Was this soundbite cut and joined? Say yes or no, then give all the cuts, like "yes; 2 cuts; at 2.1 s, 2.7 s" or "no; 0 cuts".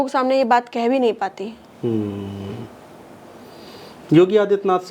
no; 0 cuts